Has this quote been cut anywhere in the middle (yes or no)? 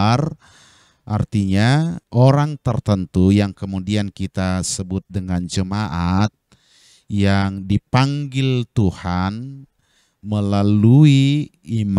yes